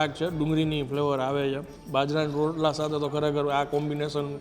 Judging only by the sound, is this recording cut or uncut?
cut